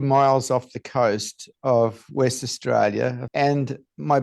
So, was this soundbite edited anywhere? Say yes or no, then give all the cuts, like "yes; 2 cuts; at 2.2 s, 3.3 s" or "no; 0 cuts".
yes; 1 cut; at 3.2 s